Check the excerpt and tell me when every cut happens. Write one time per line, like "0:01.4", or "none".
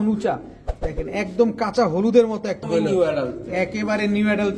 0:02.6